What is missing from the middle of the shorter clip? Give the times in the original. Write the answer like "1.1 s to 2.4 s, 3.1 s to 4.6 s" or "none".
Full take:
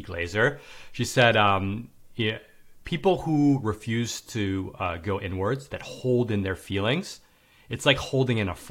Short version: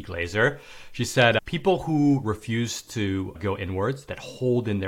1.4 s to 2.8 s, 4.7 s to 5.0 s